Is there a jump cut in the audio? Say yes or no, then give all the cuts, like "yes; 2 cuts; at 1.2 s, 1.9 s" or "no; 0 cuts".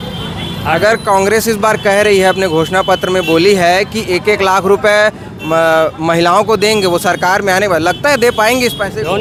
no; 0 cuts